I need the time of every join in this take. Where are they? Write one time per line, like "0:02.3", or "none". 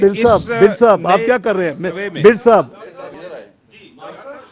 0:03.1